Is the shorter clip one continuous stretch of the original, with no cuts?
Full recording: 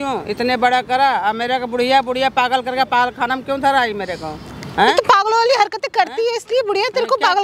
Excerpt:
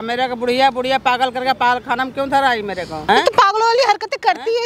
no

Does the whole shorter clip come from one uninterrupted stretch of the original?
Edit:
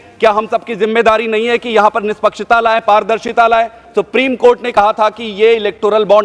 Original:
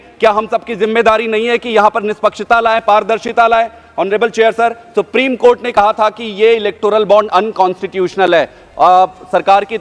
no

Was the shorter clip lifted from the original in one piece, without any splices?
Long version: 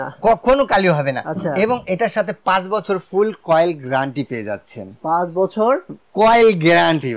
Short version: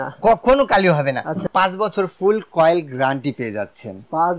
no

